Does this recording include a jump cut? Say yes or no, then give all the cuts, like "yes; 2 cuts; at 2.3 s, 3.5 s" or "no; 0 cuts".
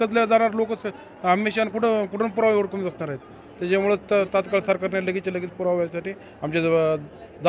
no; 0 cuts